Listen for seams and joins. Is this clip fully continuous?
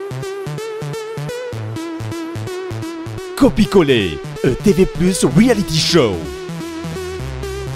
yes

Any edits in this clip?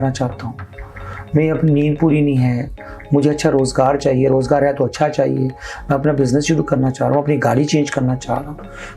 no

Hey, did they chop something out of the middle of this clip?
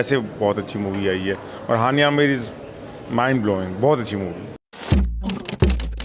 no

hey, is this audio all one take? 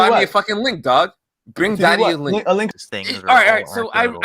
no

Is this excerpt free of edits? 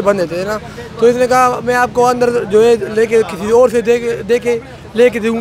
yes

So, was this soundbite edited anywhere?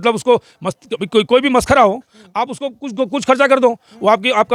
no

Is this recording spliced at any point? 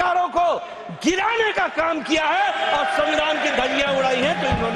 no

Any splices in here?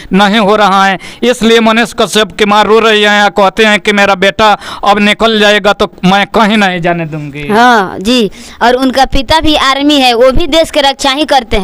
no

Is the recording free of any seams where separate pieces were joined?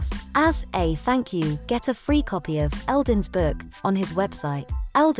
yes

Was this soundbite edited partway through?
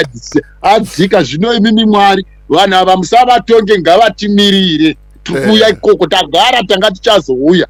no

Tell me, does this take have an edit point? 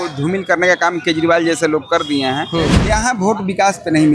yes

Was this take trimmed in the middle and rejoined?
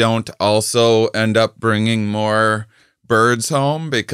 no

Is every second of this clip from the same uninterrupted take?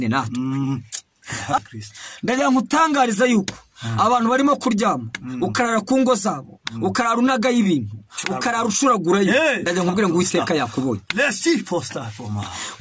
no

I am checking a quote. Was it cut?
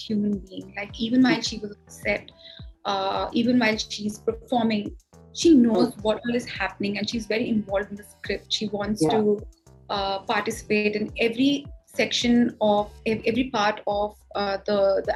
no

